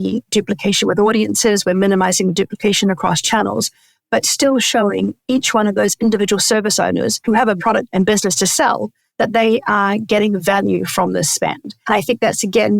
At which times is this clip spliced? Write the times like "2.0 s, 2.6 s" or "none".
7.3 s, 9.0 s, 11.8 s